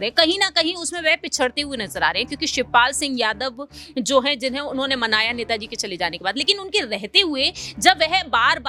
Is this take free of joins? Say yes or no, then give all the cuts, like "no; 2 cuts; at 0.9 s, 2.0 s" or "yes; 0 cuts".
yes; 0 cuts